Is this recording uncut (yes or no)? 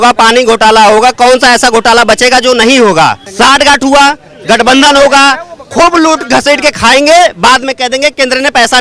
no